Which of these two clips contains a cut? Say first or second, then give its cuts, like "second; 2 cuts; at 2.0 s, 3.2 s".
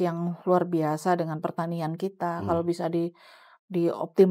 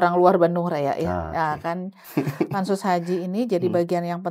second; 1 cut; at 2.0 s